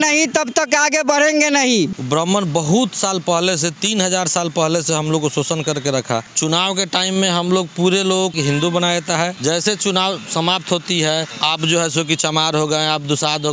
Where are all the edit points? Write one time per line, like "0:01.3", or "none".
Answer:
0:01.9
0:06.3
0:08.3
0:09.4
0:11.3